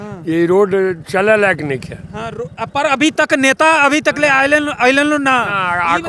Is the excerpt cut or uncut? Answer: uncut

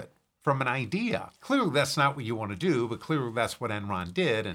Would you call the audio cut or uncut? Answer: cut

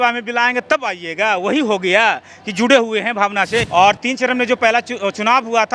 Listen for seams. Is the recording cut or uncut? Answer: cut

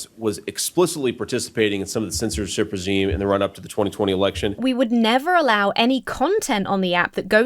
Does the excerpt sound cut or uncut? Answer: cut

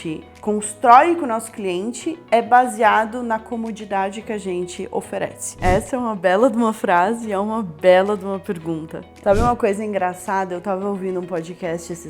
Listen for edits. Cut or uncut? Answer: cut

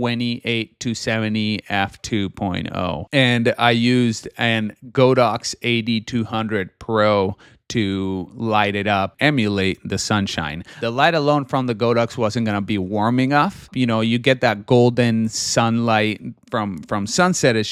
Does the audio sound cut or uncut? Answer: uncut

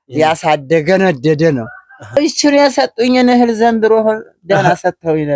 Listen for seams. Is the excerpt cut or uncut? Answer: cut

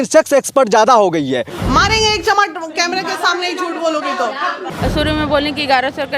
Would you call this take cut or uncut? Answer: cut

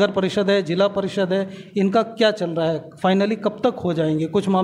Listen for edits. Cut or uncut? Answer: uncut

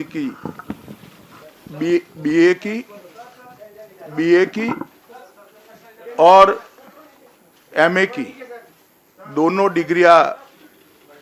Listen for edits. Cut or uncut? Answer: uncut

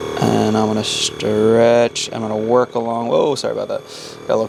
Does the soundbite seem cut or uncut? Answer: uncut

